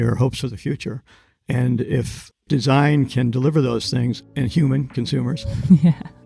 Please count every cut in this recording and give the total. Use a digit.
1